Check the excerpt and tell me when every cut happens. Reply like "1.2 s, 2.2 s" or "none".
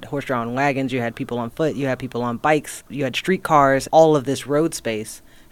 2.8 s, 3.9 s